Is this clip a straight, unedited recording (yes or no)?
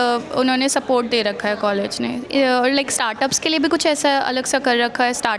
yes